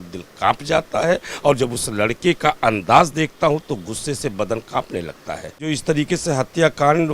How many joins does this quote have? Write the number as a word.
one